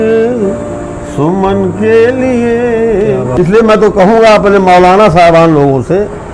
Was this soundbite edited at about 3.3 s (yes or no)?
yes